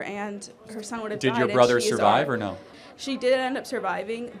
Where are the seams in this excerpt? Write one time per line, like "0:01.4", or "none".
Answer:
0:02.7